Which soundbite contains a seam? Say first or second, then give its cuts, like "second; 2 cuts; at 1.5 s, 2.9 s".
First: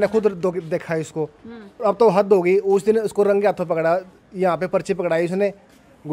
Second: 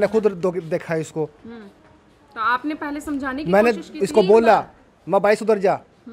first; 1 cut; at 1.8 s